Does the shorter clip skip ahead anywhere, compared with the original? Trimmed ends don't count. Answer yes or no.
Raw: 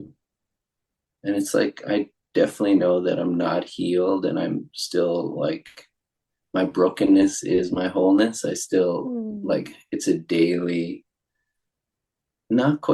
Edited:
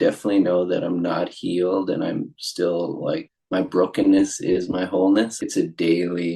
yes